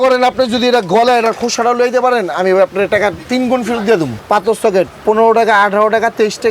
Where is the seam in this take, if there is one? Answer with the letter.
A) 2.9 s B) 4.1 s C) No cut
B